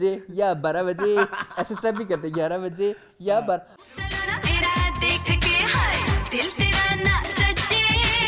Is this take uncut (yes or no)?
yes